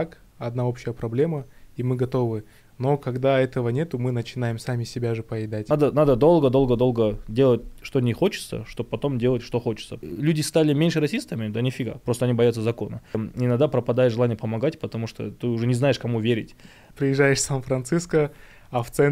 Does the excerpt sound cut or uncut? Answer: cut